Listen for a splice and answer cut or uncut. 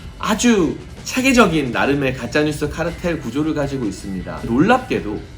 cut